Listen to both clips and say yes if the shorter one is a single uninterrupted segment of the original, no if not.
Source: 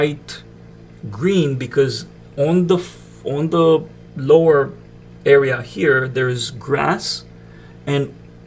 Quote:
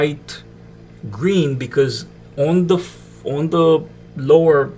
yes